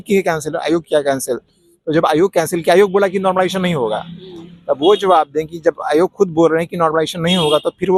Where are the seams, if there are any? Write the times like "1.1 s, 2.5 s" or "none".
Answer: none

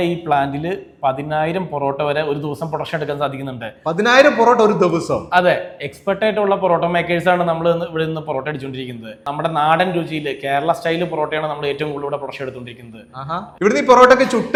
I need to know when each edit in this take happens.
none

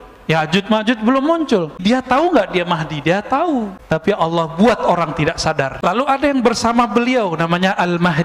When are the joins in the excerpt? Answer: 1.8 s, 3.9 s, 6.0 s

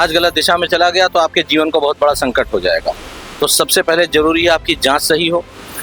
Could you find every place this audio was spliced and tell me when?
none

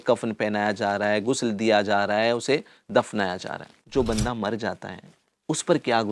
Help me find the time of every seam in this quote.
3.8 s

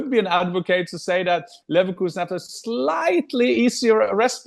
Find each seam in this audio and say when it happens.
none

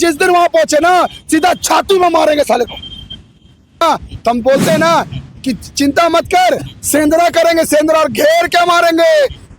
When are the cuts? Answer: 3.8 s

